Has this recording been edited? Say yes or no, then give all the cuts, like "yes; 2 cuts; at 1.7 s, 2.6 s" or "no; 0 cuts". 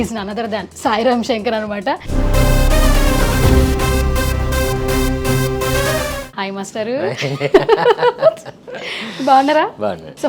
no; 0 cuts